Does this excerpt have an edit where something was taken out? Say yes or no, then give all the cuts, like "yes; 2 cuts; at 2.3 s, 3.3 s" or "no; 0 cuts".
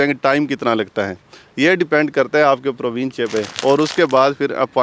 yes; 1 cut; at 3.5 s